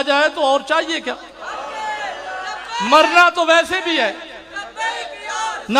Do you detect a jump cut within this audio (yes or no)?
no